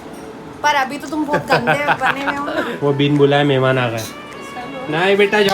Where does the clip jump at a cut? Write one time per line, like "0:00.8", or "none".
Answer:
0:02.7